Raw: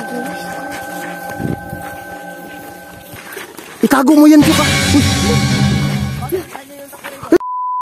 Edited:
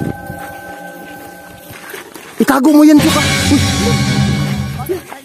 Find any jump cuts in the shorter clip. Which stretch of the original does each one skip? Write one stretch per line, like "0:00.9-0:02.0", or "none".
none